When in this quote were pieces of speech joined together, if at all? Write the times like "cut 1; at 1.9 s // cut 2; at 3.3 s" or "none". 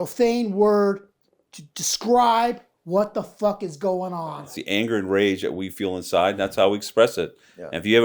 cut 1; at 4.4 s